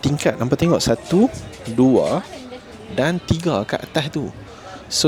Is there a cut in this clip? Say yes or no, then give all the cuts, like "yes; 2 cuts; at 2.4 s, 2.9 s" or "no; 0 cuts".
no; 0 cuts